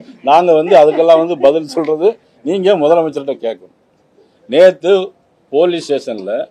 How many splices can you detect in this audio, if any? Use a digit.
1